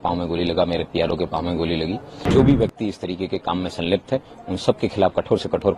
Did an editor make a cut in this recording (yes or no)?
yes